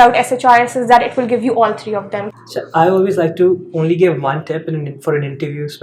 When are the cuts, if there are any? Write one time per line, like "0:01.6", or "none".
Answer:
0:02.3